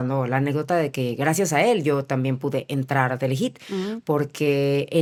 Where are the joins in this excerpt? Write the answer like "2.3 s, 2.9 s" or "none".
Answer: none